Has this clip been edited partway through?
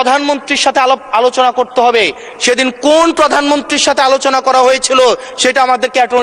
no; 0 cuts

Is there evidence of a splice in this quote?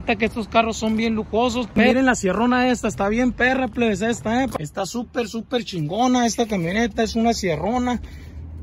yes; 2 cuts; at 1.7 s, 4.5 s

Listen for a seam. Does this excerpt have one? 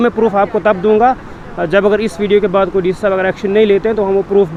no; 0 cuts

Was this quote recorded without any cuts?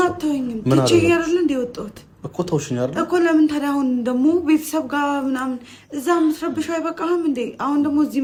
yes; 0 cuts

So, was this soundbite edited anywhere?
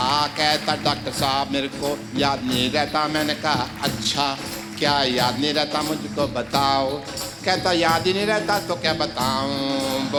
no; 0 cuts

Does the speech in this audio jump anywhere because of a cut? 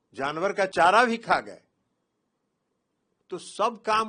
no; 0 cuts

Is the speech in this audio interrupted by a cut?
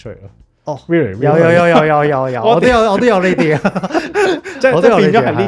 no; 0 cuts

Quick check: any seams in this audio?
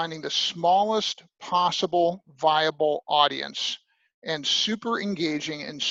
no; 0 cuts

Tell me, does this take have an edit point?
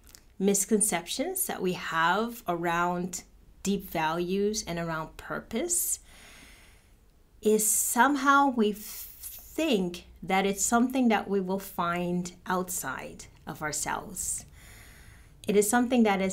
no; 0 cuts

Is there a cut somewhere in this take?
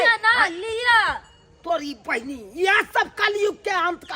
no; 0 cuts

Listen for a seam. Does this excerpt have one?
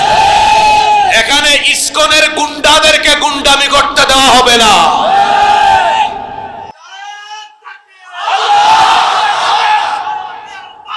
no; 0 cuts

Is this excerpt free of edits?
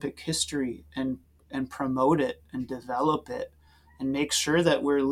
yes; 0 cuts

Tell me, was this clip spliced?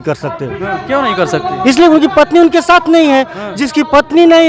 no; 0 cuts

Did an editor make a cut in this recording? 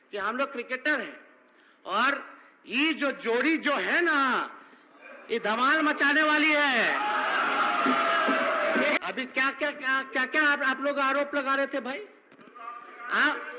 yes; 1 cut; at 9.0 s

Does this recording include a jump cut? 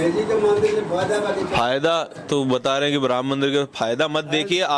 no; 0 cuts

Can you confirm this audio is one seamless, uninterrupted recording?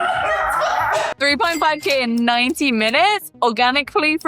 no; 1 cut; at 0.9 s

